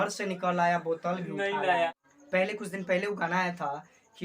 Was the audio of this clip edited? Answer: yes; 1 cut; at 2.1 s

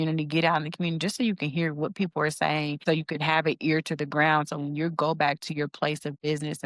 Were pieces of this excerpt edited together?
yes; 1 cut; at 2.8 s

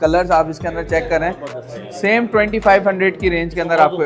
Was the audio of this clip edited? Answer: no; 0 cuts

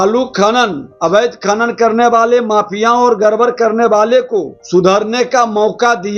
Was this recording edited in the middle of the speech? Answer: yes; 1 cut; at 4.6 s

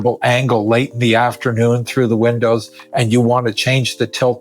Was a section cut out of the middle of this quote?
no; 0 cuts

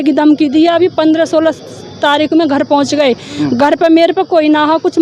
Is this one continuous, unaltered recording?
yes; 0 cuts

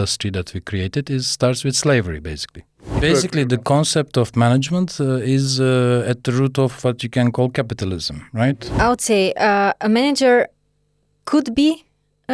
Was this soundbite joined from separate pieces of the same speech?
yes; 2 cuts; at 2.8 s, 8.7 s

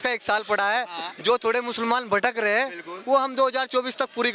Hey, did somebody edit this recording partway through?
no; 0 cuts

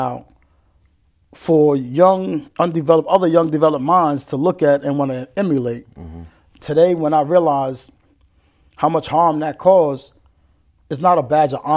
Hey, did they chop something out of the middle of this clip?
no; 0 cuts

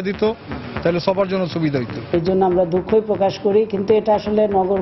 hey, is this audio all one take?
no; 1 cut; at 2.0 s

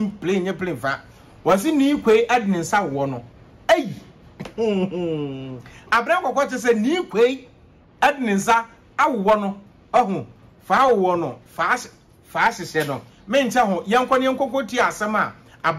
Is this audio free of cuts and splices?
yes; 0 cuts

